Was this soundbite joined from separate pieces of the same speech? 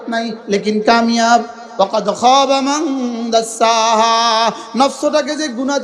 yes; 1 cut; at 1.6 s

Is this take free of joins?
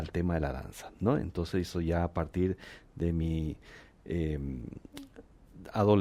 yes; 0 cuts

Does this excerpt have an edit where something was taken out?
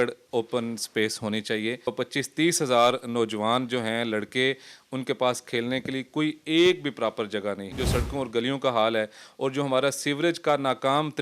yes; 2 cuts; at 1.9 s, 7.8 s

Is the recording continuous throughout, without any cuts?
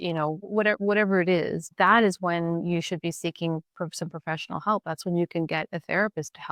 yes; 0 cuts

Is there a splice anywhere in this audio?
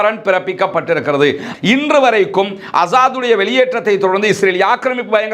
yes; 1 cut; at 1.5 s

